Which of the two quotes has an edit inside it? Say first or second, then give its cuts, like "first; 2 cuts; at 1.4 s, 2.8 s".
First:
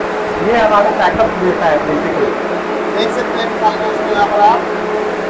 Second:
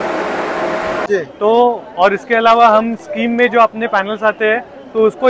second; 1 cut; at 1.0 s